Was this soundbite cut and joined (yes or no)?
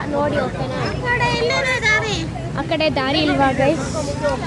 no